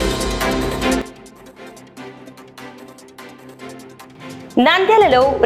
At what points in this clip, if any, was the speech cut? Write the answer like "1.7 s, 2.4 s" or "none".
1.0 s, 3.2 s, 4.2 s